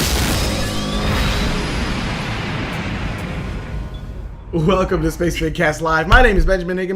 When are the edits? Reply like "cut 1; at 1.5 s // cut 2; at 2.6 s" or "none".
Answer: cut 1; at 5.8 s

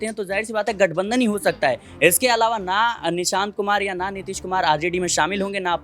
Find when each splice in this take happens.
none

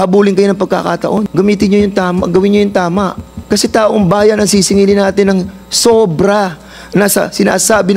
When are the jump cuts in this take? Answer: cut 1; at 1.3 s // cut 2; at 3.3 s

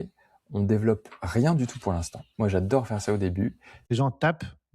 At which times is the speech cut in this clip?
cut 1; at 3.8 s

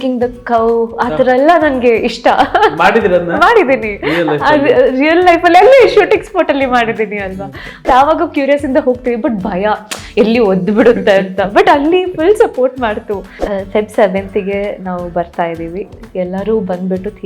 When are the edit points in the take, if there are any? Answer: cut 1; at 7.9 s // cut 2; at 13.4 s

